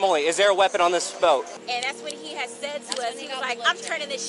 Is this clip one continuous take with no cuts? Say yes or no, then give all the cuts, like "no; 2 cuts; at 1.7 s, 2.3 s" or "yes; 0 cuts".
no; 1 cut; at 1.6 s